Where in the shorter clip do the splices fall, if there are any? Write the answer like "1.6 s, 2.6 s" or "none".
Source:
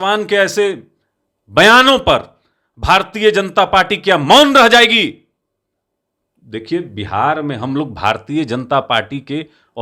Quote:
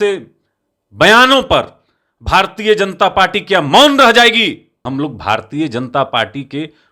4.8 s